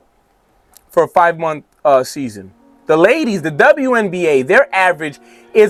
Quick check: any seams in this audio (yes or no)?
no